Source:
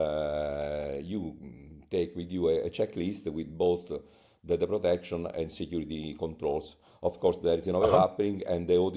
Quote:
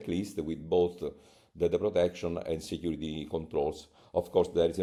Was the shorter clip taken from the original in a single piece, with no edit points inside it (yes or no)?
yes